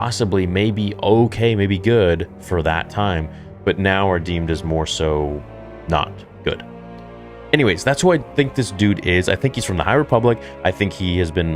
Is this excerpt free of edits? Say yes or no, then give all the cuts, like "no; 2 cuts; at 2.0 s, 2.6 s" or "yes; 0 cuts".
no; 1 cut; at 7.0 s